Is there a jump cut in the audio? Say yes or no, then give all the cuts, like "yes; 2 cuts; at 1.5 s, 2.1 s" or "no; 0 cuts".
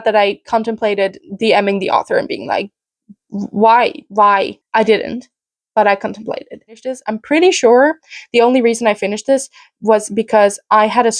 yes; 1 cut; at 7.1 s